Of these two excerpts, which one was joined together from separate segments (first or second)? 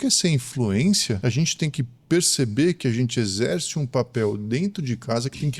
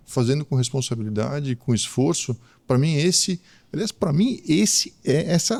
first